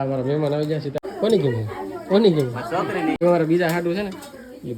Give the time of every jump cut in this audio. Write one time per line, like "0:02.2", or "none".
0:01.0
0:03.2